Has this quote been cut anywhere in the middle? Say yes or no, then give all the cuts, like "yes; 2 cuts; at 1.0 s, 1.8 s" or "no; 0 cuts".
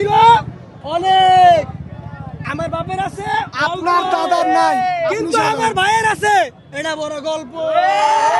no; 0 cuts